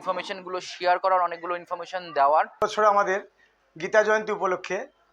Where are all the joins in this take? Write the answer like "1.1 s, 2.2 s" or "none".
2.6 s